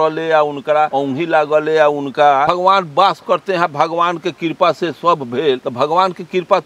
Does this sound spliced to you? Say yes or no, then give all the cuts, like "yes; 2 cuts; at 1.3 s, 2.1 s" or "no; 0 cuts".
yes; 3 cuts; at 0.9 s, 2.5 s, 5.7 s